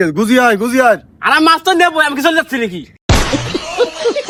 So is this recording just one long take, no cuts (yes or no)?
yes